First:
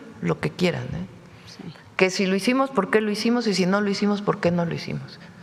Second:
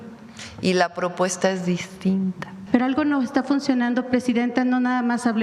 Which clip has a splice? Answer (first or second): second